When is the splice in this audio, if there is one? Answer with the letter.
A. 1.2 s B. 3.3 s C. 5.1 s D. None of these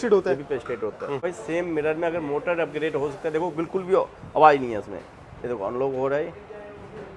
A